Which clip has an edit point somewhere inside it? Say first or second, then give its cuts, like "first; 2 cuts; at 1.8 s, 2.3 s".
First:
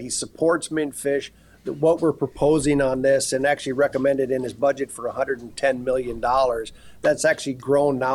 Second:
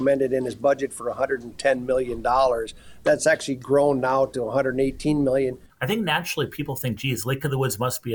second; 1 cut; at 5.7 s